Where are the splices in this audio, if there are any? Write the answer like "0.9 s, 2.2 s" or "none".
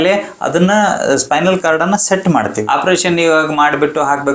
2.6 s